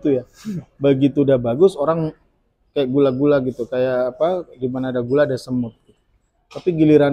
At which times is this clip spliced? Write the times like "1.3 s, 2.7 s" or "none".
none